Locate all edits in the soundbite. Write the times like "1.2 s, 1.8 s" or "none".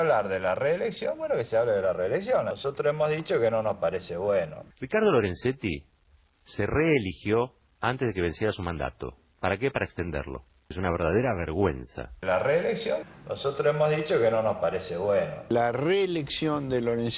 2.5 s

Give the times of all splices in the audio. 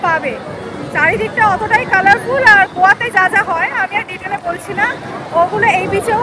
none

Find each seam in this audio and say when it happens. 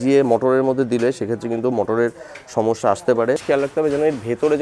3.4 s

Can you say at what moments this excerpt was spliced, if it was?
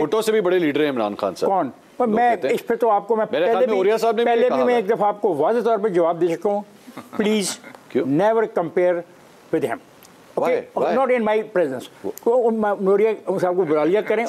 none

